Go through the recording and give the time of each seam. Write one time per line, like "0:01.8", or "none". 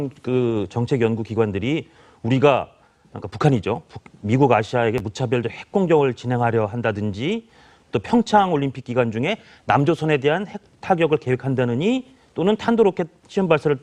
0:07.1